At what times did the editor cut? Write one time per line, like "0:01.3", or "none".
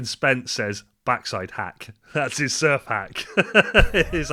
none